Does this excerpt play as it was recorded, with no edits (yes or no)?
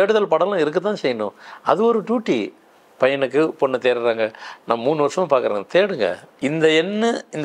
no